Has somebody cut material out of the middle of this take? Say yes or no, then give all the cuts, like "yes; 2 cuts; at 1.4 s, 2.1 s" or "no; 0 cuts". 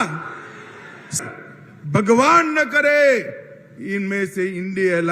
yes; 1 cut; at 1.2 s